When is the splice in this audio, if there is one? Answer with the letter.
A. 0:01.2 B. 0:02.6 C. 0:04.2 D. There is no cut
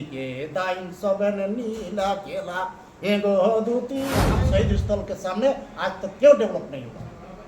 C